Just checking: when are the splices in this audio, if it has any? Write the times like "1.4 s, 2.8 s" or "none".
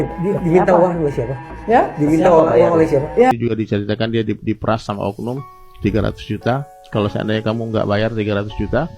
3.3 s